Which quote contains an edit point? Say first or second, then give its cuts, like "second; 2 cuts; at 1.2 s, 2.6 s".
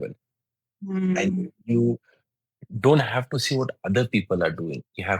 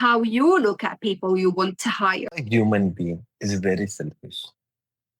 second; 1 cut; at 2.3 s